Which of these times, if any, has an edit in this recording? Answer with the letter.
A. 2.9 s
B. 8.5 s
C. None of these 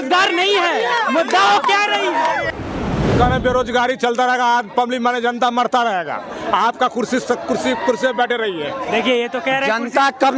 A